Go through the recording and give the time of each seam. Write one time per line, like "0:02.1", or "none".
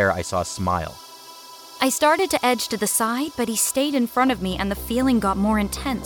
0:01.3